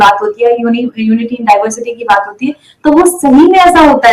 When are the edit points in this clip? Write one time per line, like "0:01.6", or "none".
none